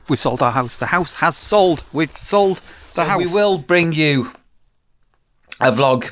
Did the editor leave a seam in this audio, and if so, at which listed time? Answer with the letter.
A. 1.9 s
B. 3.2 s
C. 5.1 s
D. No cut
B